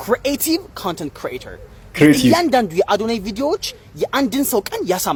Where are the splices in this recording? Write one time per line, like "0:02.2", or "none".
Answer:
none